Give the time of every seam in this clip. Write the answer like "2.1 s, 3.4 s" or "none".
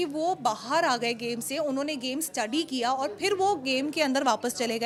none